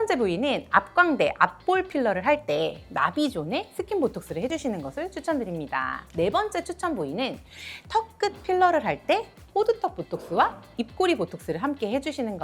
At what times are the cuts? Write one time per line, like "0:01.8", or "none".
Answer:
0:04.5
0:06.0

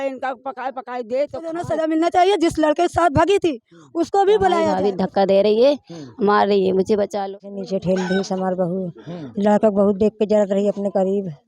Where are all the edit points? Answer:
0:01.7
0:04.7
0:07.5

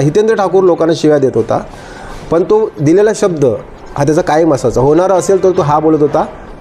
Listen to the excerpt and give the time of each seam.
none

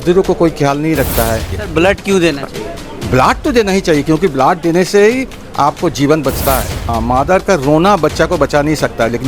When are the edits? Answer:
0:01.6
0:07.0

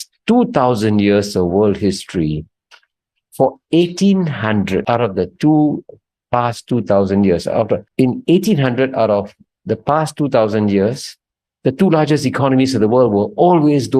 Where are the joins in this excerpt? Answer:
0:04.8
0:07.9

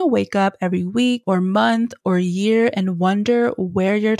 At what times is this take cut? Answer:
0:01.2

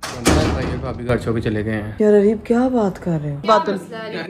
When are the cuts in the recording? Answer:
0:01.9
0:03.4

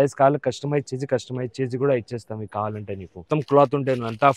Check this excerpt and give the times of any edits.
0:03.2

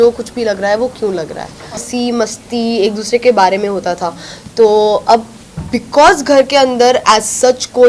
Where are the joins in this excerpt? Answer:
0:01.9

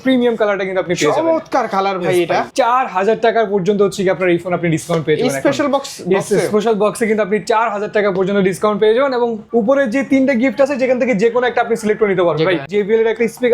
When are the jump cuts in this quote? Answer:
0:02.5
0:09.4
0:12.7

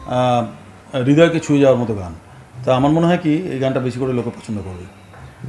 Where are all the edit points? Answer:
none

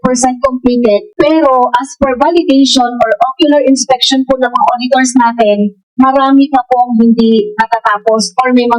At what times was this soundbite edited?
0:01.1

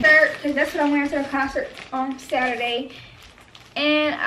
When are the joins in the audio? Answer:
none

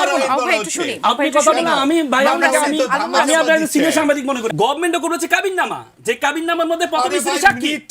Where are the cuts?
0:04.4

